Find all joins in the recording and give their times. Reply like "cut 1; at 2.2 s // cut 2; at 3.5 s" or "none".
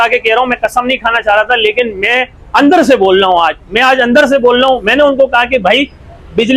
none